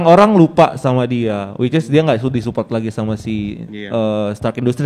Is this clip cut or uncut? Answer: uncut